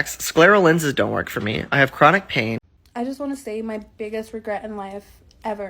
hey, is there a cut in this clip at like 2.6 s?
yes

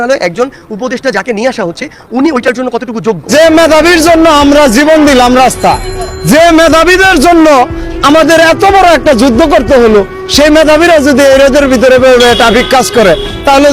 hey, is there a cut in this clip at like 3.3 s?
yes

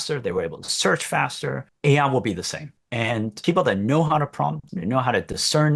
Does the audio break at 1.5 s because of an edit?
no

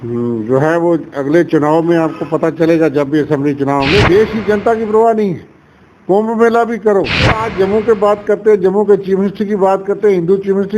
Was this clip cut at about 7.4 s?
yes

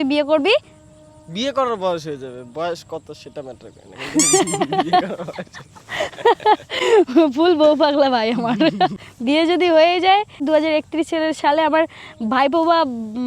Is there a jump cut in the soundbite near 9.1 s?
yes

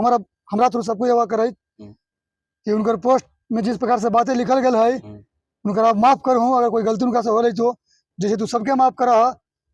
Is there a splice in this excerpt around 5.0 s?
no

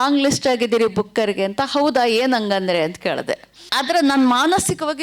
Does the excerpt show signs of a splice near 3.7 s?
yes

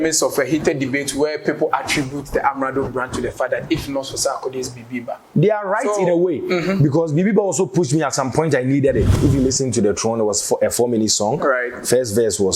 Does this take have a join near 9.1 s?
yes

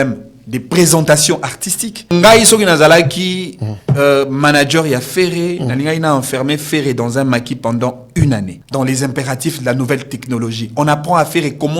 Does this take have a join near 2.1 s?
yes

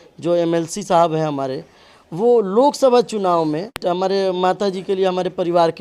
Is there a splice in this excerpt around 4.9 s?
no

